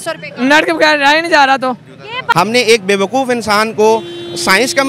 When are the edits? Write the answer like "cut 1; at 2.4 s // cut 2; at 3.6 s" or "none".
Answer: cut 1; at 2.2 s